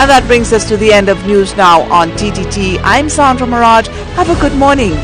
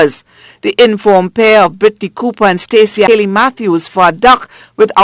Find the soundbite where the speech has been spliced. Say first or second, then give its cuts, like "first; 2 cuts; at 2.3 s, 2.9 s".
second; 1 cut; at 3.1 s